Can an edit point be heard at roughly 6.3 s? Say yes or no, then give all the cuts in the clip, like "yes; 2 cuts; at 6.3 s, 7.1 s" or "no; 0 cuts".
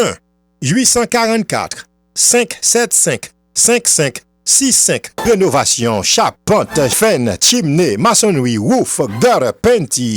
no; 1 cut; at 5.1 s